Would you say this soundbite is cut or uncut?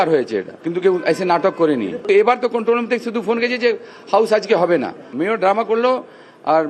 uncut